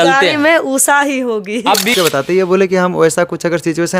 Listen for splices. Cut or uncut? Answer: cut